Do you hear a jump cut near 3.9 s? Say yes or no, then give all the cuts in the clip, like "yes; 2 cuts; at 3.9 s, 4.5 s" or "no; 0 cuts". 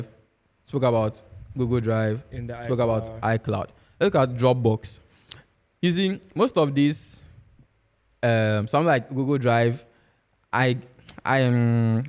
no; 0 cuts